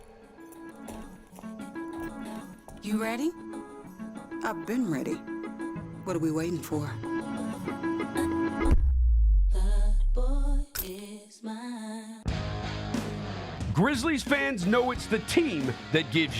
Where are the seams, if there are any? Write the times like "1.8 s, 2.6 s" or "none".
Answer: 12.2 s